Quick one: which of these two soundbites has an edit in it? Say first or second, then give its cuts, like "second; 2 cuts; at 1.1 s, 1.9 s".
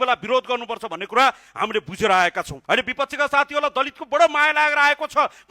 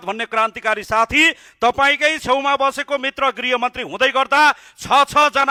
first; 1 cut; at 2.5 s